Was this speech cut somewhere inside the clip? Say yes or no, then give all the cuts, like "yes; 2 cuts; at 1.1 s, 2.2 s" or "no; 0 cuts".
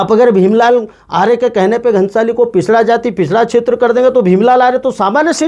no; 0 cuts